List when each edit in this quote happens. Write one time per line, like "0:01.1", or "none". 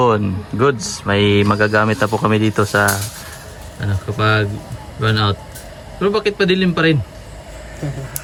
none